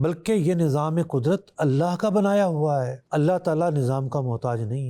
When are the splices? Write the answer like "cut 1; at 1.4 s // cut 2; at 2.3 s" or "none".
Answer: cut 1; at 3.0 s

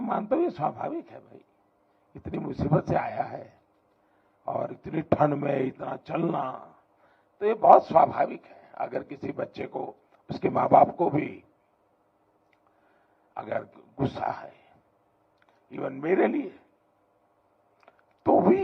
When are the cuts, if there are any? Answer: none

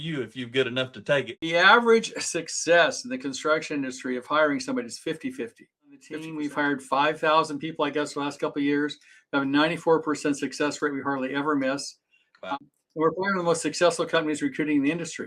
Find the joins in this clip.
cut 1; at 1.4 s // cut 2; at 6.3 s // cut 3; at 12.5 s

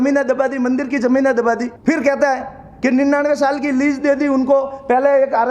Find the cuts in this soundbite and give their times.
cut 1; at 1.7 s

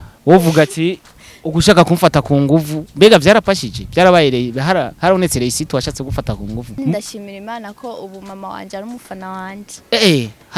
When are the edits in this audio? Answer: cut 1; at 6.7 s

